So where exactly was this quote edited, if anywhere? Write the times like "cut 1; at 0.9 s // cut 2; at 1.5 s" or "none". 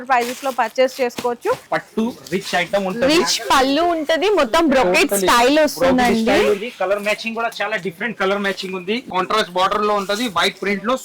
cut 1; at 1.7 s // cut 2; at 9.1 s